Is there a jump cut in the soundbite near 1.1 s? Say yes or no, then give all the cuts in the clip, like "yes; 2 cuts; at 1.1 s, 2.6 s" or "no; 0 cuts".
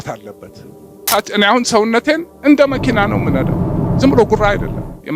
yes; 1 cut; at 1.1 s